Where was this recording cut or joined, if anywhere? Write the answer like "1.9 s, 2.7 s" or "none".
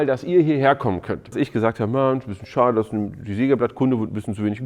1.3 s